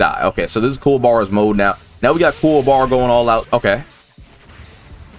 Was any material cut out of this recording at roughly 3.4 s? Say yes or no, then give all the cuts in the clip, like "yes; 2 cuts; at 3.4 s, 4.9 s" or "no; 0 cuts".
yes; 1 cut; at 3.4 s